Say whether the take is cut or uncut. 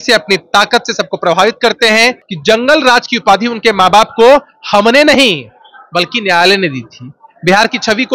cut